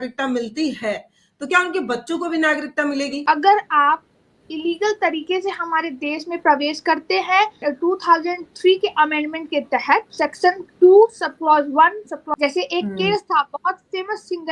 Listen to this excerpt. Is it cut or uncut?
cut